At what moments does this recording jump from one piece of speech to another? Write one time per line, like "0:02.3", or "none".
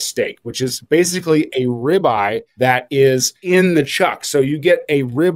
0:02.4
0:03.4